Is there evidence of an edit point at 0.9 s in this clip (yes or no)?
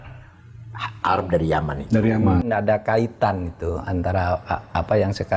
no